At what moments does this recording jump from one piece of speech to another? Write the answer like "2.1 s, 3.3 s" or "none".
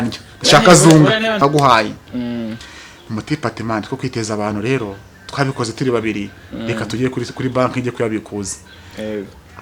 1.4 s